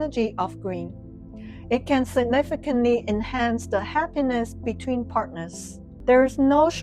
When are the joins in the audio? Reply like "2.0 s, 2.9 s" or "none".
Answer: 5.9 s